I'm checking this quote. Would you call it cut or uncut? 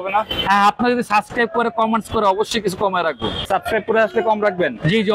cut